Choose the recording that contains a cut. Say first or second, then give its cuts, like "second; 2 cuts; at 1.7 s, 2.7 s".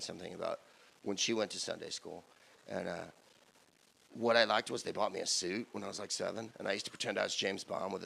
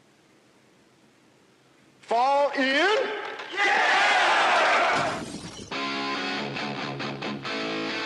second; 1 cut; at 1.6 s